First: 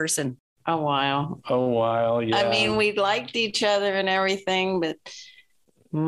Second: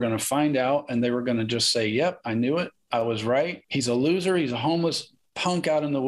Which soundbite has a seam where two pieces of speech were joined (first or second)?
second